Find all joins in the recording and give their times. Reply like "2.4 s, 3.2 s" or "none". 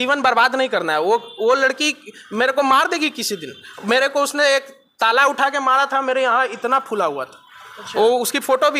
none